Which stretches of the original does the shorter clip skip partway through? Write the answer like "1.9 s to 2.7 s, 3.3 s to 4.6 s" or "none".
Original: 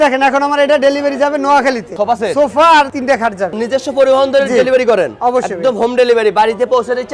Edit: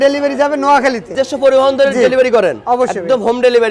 1.9 s to 3.6 s